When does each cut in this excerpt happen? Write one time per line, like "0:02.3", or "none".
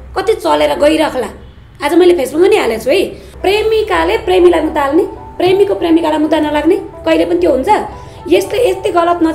0:03.3

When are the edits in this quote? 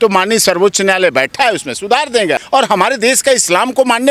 0:02.4

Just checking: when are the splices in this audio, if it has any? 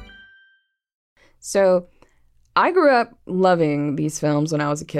0:01.0

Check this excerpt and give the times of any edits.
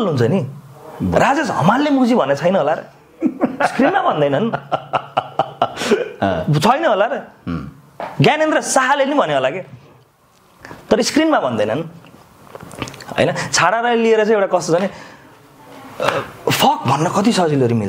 none

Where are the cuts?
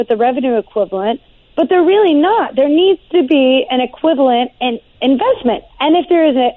0:04.9
0:05.7

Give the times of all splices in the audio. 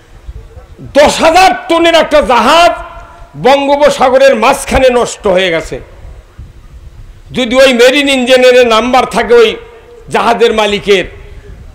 none

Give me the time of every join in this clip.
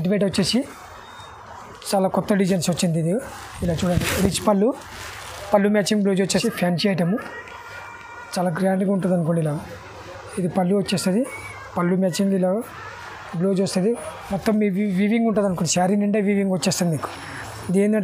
0:06.4
0:14.1

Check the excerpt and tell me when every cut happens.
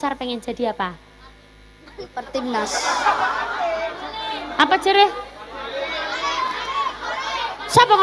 none

